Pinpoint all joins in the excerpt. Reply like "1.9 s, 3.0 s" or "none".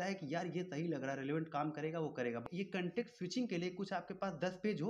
2.4 s

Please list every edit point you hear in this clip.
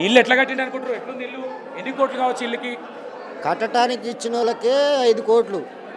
none

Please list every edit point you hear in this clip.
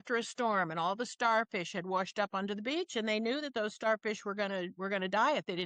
none

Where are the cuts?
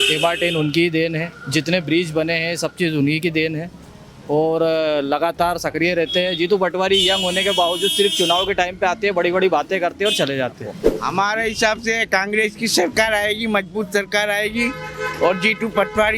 10.9 s

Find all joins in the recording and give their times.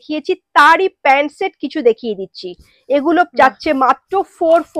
none

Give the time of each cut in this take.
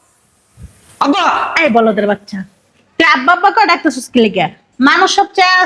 none

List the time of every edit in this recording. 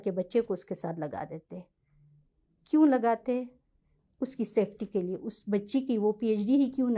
none

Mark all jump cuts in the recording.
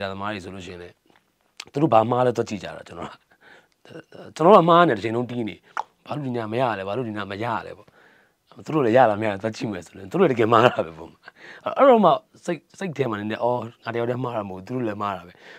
none

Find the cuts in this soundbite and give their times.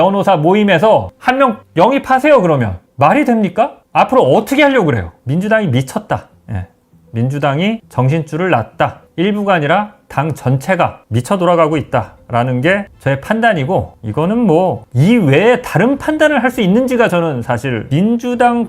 5.2 s, 17.8 s

